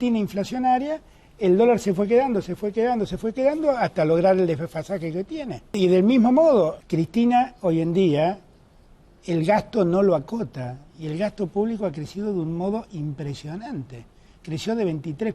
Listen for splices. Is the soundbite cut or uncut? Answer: cut